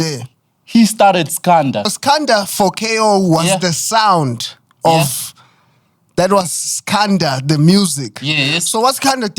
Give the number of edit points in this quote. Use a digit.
1